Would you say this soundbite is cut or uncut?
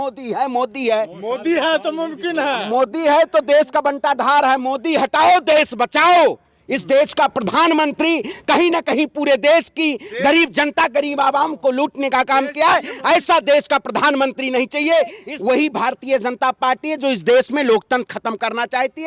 cut